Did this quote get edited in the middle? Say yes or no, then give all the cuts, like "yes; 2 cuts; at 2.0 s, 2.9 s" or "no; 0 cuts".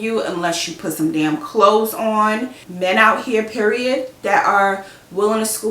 yes; 1 cut; at 2.5 s